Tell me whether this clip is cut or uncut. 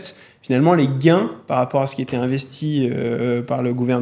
uncut